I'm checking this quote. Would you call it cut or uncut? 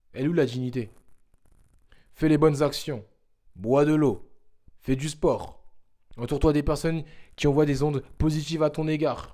uncut